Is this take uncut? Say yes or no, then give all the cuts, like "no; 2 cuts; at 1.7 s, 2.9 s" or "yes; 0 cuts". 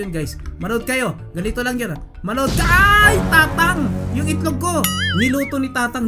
yes; 0 cuts